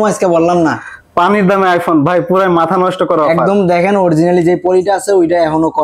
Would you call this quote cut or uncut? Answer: uncut